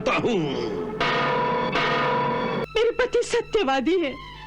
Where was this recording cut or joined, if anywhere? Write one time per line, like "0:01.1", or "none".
0:02.7